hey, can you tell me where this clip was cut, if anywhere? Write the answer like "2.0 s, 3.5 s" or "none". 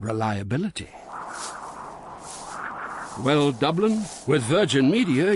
none